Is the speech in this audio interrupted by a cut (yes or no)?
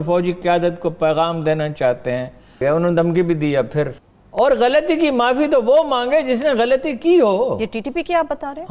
yes